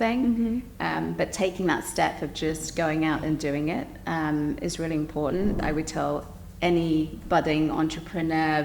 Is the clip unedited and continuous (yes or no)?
no